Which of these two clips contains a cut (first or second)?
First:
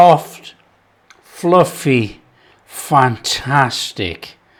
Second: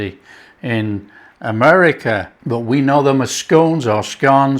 second